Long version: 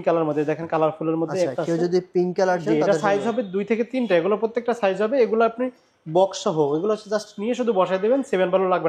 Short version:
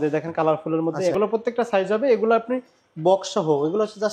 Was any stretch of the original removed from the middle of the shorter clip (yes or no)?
yes